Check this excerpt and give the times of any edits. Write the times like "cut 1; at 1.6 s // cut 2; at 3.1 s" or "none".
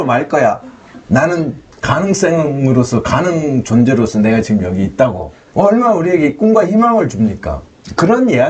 none